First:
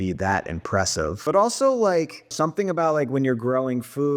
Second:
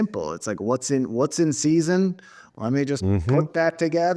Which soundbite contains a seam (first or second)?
first